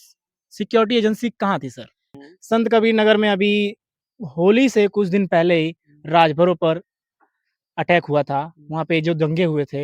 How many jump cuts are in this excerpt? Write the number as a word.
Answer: one